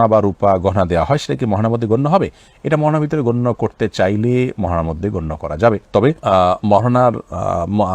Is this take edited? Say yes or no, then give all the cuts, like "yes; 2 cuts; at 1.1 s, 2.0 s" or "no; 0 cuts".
no; 0 cuts